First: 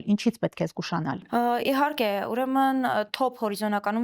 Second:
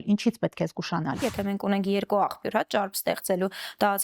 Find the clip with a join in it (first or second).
second